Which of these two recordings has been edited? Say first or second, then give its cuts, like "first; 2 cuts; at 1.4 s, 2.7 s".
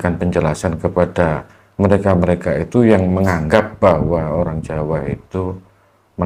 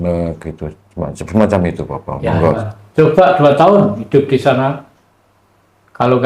second; 1 cut; at 2.6 s